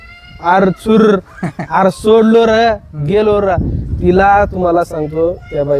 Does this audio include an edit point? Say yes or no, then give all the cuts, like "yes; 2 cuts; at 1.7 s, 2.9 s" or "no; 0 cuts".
no; 0 cuts